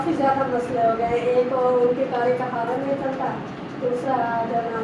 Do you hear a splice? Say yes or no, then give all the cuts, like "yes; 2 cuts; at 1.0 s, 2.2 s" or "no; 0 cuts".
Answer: no; 0 cuts